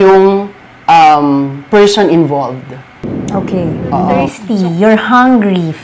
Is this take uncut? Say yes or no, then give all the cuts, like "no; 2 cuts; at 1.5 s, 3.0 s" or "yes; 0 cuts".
no; 1 cut; at 4.4 s